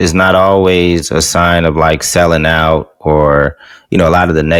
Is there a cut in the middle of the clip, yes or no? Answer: no